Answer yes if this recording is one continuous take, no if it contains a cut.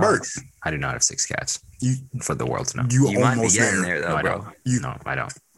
yes